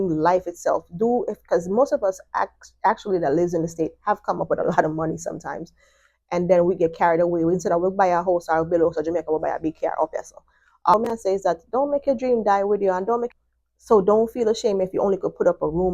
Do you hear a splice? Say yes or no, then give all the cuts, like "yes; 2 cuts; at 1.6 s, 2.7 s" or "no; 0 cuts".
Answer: yes; 2 cuts; at 10.9 s, 13.3 s